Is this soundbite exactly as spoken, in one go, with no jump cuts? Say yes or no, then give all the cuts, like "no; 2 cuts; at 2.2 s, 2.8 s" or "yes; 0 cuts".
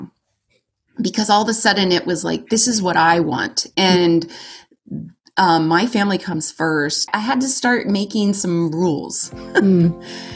yes; 0 cuts